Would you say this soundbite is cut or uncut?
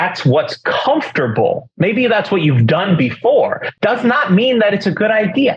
cut